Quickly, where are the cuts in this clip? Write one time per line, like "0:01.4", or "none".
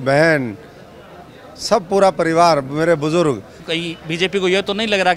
0:03.6

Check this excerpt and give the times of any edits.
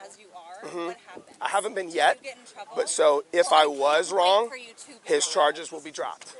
none

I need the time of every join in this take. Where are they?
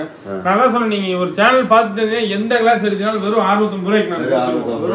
none

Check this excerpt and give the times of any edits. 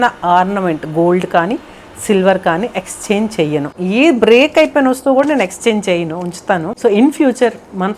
0:03.7

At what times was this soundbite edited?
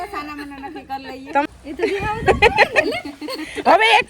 0:01.4

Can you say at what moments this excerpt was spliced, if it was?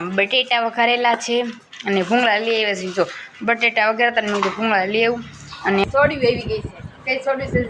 0:05.8

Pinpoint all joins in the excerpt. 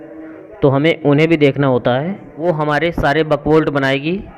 0:02.3

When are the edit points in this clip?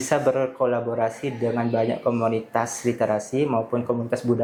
none

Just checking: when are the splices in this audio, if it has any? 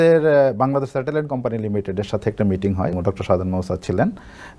0:02.9

